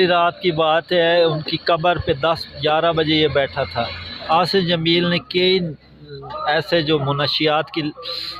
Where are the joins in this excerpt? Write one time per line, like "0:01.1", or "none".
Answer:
0:04.1